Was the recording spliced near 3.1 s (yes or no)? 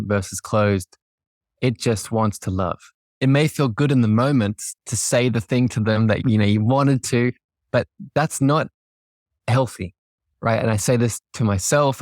yes